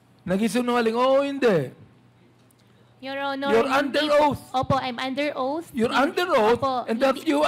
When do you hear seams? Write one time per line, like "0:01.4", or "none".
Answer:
none